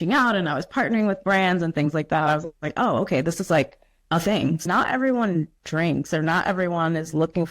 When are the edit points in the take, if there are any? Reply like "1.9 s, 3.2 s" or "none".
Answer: 4.6 s